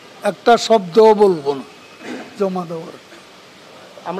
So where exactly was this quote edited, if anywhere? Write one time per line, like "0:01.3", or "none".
none